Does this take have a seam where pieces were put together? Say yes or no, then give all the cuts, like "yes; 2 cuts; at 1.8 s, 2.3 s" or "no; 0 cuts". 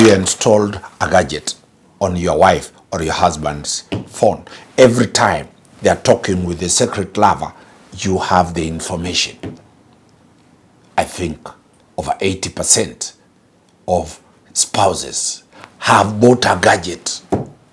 no; 0 cuts